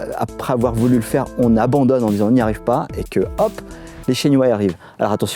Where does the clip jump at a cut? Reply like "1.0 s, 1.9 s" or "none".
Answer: none